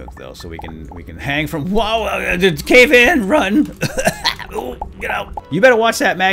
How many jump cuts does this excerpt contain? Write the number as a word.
one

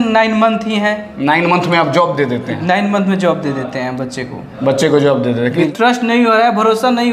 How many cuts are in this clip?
one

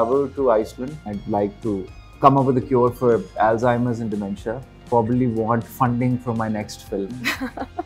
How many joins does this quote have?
three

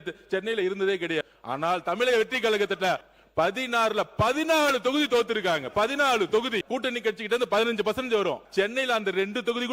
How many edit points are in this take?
four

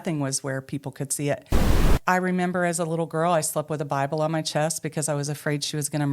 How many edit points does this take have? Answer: one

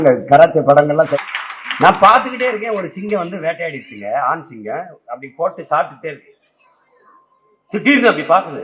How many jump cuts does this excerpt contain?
one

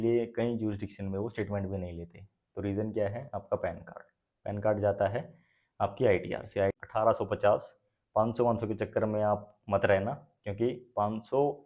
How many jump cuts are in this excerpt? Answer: one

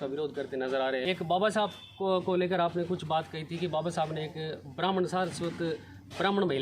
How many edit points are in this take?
one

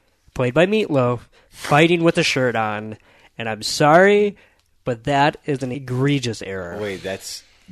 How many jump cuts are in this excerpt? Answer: one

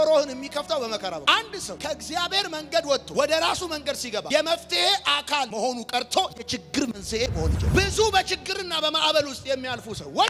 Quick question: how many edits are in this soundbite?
two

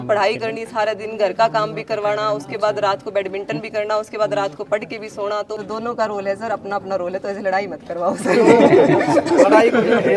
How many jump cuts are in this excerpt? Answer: one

